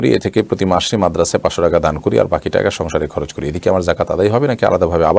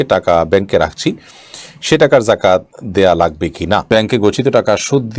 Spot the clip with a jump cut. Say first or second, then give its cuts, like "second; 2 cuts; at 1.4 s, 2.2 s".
second; 1 cut; at 3.9 s